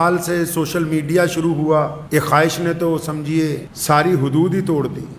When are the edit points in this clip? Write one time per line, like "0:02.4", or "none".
0:02.0
0:03.7